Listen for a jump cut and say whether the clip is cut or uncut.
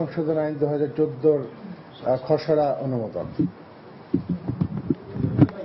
uncut